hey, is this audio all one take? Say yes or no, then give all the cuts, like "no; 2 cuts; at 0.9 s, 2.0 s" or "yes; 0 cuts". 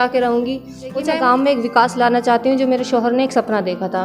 no; 1 cut; at 1.0 s